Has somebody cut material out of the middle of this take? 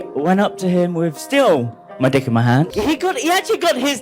yes; 1 cut; at 2.7 s

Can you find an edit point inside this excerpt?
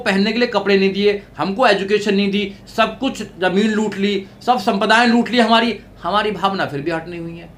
no; 0 cuts

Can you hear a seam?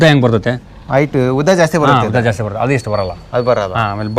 no; 0 cuts

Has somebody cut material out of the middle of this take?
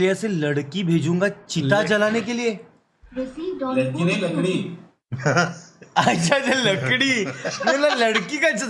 no; 0 cuts

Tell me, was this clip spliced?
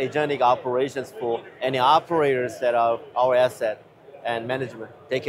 no; 0 cuts

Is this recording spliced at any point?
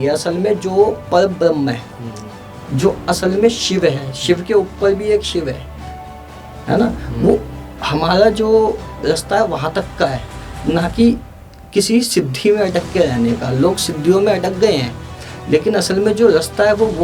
no; 0 cuts

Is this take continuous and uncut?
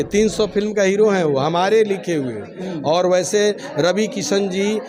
yes; 0 cuts

